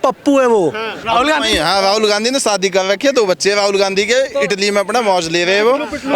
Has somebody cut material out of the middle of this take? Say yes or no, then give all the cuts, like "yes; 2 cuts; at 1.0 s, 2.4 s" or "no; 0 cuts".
yes; 1 cut; at 1.0 s